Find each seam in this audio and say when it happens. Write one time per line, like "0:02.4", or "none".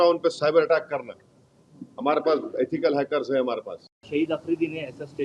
0:03.9